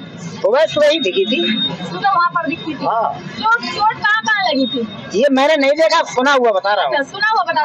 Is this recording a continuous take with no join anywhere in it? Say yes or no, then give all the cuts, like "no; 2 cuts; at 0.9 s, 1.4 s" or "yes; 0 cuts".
yes; 0 cuts